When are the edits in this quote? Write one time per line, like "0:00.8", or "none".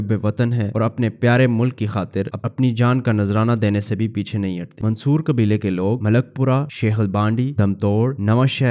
0:04.7